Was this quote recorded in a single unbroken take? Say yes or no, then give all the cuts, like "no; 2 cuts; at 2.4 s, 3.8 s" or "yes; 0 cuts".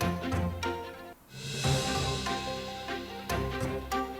no; 2 cuts; at 1.3 s, 3.4 s